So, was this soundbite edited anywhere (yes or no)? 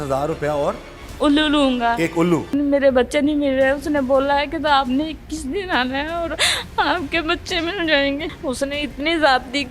yes